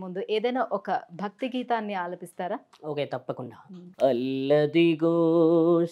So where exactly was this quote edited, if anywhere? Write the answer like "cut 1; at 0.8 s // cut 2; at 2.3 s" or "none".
none